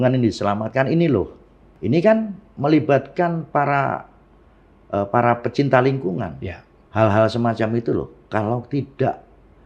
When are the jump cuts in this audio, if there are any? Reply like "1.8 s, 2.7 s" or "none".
1.7 s, 6.8 s